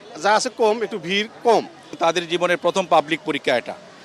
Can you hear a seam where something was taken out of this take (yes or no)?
yes